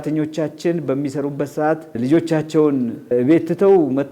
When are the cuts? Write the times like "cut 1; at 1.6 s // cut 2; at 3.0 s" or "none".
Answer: cut 1; at 1.9 s // cut 2; at 3.1 s